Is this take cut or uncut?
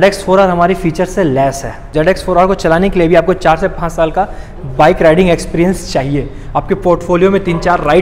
cut